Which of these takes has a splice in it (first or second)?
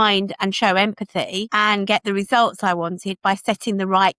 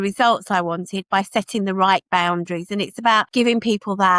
second